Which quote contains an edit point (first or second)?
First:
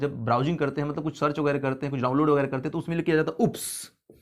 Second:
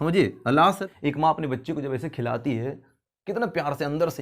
second